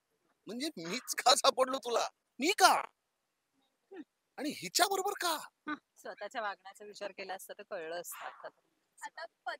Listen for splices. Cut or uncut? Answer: cut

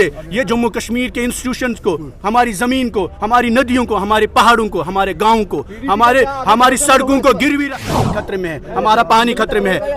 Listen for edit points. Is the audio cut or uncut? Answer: cut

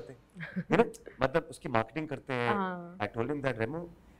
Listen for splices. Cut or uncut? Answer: cut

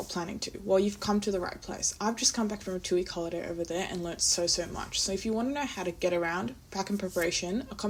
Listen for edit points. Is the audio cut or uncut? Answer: uncut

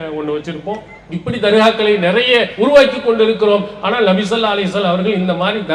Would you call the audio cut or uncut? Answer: cut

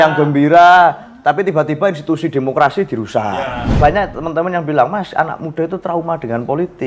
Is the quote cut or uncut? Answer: cut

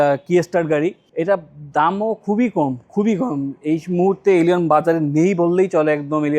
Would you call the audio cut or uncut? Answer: cut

